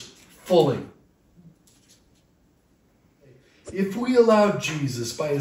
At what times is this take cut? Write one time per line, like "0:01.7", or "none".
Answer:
0:03.5